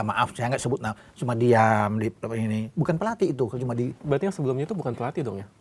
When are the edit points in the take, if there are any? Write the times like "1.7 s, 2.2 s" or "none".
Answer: 4.0 s